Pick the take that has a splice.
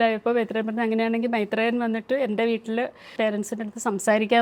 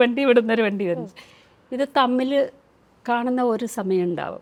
first; 1 cut; at 3.0 s

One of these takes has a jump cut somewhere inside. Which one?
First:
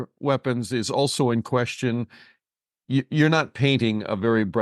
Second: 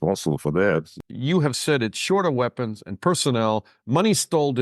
second; 1 cut; at 1.0 s

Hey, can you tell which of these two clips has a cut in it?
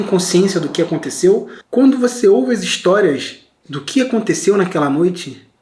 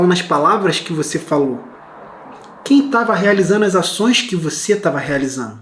first; 1 cut; at 1.6 s

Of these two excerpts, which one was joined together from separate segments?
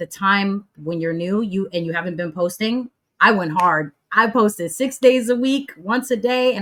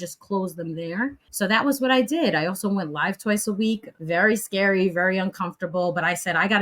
second; 2 cuts; at 1.2 s, 3.9 s

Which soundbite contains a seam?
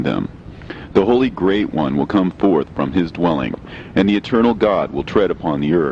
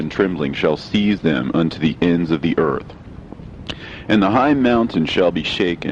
second; 1 cut; at 4.3 s

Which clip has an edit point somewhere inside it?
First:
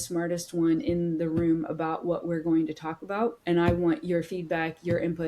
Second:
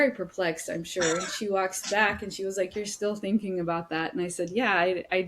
first; 1 cut; at 3.4 s

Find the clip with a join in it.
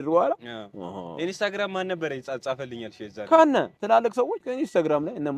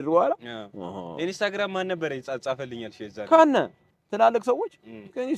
first; 1 cut; at 4.0 s

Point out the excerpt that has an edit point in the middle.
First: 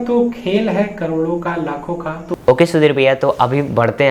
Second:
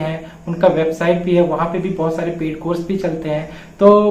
first; 1 cut; at 2.2 s

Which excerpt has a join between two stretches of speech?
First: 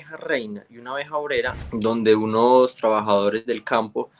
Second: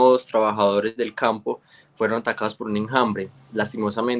first; 1 cut; at 1.6 s

